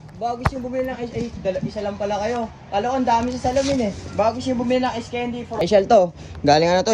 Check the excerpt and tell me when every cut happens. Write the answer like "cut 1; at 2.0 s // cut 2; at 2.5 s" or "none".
cut 1; at 5.6 s

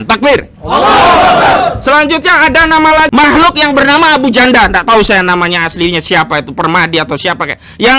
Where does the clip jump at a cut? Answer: cut 1; at 3.1 s

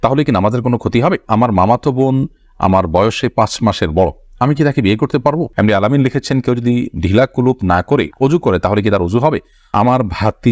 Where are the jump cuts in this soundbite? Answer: cut 1; at 1.2 s // cut 2; at 5.5 s // cut 3; at 9.7 s

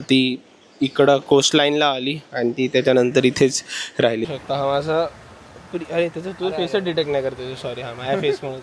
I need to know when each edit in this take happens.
cut 1; at 4.3 s

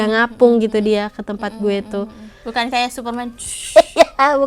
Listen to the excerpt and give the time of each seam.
cut 1; at 2.4 s

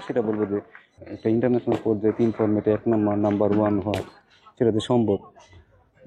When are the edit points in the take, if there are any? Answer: cut 1; at 0.9 s

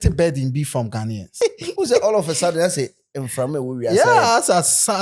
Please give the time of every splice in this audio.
cut 1; at 1.3 s

